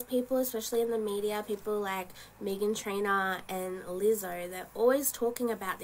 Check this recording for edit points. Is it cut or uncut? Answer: cut